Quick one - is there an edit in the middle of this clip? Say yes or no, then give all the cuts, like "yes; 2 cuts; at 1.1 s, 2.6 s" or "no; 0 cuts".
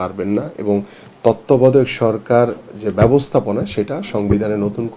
no; 0 cuts